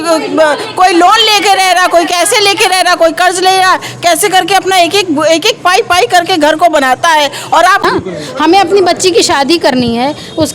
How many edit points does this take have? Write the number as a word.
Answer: one